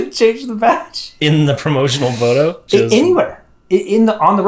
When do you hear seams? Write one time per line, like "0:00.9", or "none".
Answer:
0:01.1
0:02.6